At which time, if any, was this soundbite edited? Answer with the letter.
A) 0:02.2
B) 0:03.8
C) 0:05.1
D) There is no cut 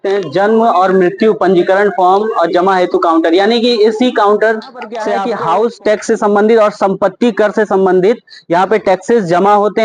C